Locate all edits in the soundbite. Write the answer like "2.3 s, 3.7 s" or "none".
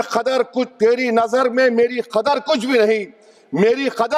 none